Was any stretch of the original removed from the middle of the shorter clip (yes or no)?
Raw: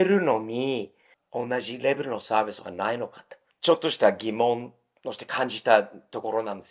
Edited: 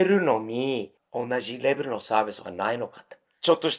yes